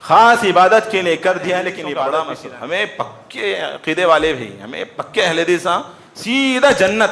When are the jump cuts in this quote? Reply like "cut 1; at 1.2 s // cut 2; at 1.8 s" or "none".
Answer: cut 1; at 1.8 s